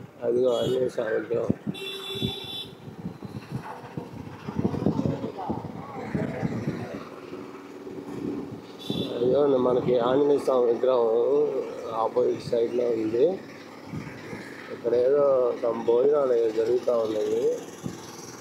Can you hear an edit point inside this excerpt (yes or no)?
no